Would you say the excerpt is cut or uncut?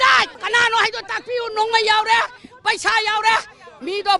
uncut